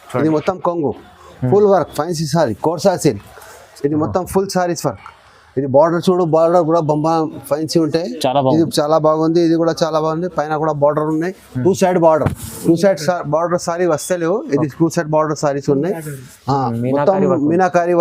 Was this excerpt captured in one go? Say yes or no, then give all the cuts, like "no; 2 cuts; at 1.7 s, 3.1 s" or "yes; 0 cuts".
yes; 0 cuts